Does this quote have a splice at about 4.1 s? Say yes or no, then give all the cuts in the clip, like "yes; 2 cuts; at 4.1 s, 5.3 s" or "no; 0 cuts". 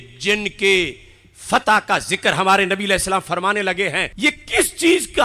yes; 1 cut; at 4.1 s